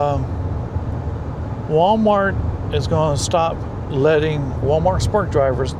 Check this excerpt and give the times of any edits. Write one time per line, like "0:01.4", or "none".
none